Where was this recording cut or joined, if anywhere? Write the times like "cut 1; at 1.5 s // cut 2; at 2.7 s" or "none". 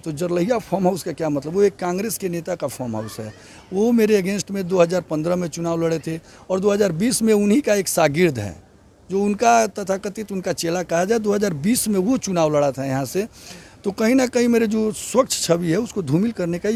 none